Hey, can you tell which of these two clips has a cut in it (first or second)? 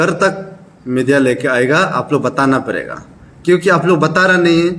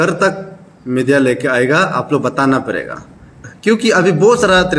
second